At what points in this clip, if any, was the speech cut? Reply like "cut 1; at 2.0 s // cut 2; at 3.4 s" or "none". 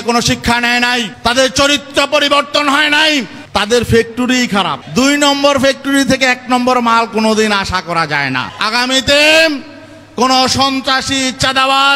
cut 1; at 1.1 s // cut 2; at 3.4 s // cut 3; at 4.8 s // cut 4; at 8.5 s